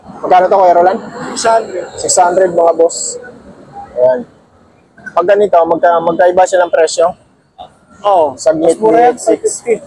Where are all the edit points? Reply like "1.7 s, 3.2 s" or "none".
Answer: none

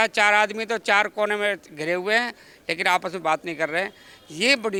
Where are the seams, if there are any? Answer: none

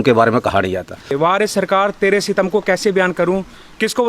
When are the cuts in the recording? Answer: 1.1 s

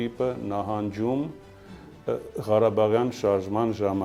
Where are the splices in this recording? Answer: none

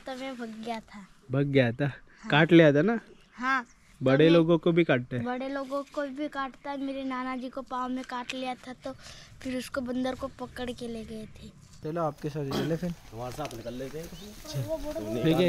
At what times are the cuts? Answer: 11.7 s

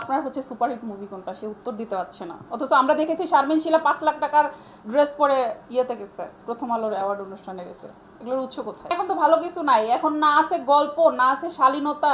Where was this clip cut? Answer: 8.9 s

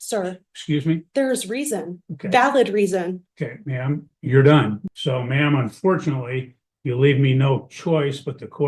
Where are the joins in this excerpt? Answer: 4.9 s

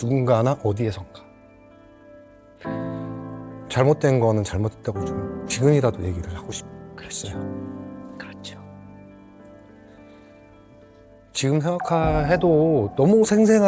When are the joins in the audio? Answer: none

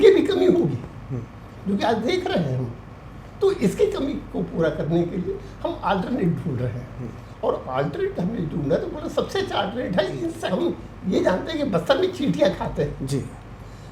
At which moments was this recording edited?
10.4 s

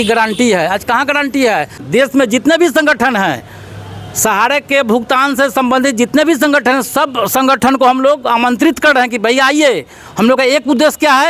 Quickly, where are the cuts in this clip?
1.8 s

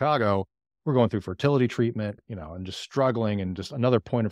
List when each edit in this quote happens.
2.2 s

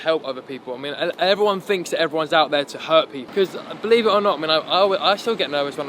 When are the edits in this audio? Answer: 3.3 s

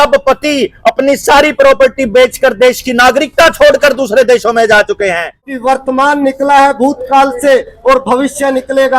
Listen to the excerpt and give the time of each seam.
5.6 s

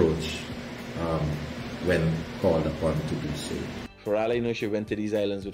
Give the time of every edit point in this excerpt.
3.8 s

